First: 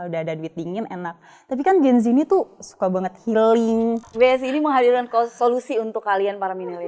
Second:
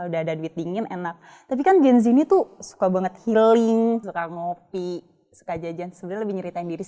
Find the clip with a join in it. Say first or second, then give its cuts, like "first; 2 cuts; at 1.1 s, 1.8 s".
first; 1 cut; at 4.1 s